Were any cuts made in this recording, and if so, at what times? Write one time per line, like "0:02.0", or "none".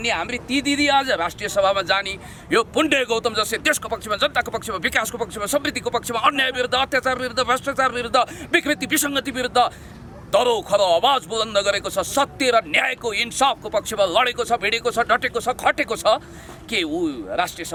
none